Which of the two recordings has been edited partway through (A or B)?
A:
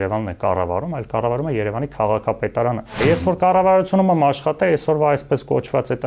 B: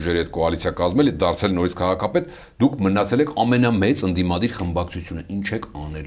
A